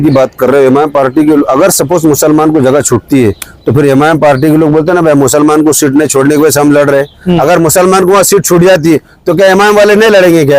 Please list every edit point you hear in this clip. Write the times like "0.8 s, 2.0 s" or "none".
none